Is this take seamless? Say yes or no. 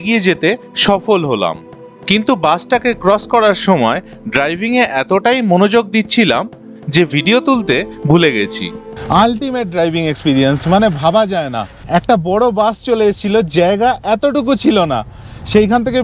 yes